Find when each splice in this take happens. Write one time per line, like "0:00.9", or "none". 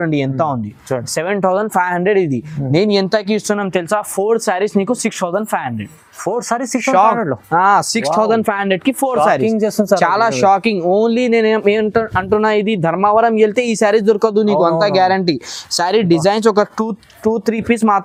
none